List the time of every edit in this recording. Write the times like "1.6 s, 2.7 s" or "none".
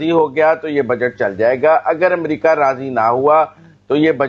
none